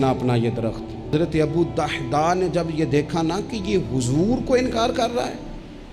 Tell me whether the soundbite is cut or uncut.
cut